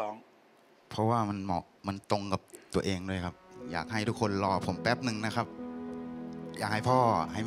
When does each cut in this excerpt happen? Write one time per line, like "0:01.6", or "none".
none